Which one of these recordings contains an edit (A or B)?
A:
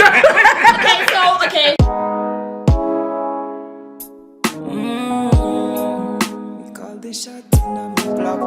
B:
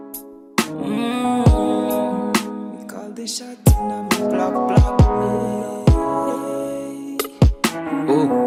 A